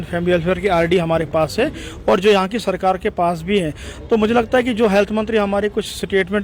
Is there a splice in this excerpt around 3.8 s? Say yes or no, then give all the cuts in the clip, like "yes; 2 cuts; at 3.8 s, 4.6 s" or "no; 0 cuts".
no; 0 cuts